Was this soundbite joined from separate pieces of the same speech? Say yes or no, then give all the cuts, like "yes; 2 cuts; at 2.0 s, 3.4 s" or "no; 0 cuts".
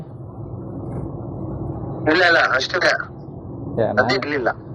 no; 0 cuts